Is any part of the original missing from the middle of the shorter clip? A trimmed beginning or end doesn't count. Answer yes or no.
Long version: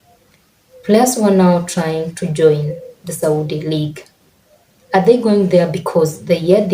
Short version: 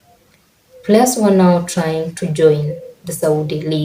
no